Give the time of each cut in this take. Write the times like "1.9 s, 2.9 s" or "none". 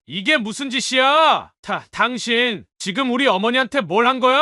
1.5 s

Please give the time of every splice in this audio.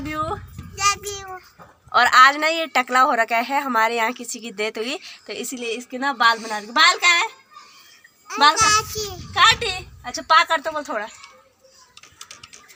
none

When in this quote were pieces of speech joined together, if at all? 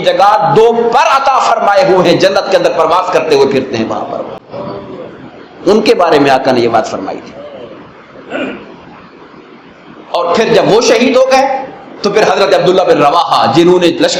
none

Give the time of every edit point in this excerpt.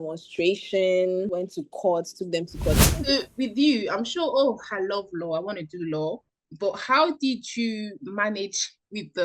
2.8 s

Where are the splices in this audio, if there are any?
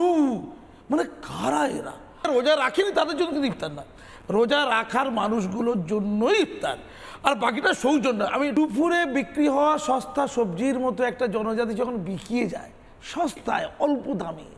2.3 s, 8.5 s

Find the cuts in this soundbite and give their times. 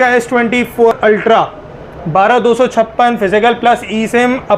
1.0 s

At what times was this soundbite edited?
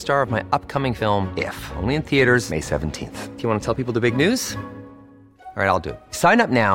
none

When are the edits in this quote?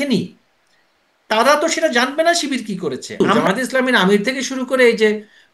3.2 s

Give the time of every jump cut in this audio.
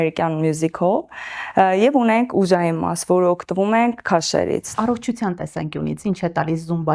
4.7 s

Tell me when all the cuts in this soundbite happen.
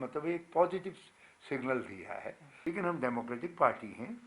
2.5 s

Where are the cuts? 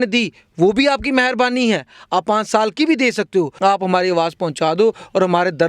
3.5 s

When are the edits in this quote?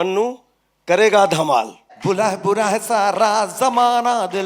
1.9 s

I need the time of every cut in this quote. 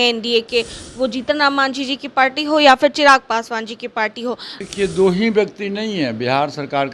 4.5 s

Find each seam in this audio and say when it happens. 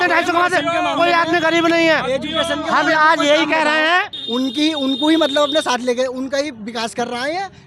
4.2 s

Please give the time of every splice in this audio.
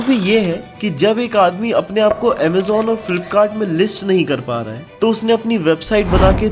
none

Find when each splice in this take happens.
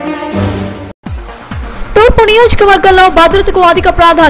1.0 s

